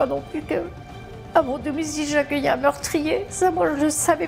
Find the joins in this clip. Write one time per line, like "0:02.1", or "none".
none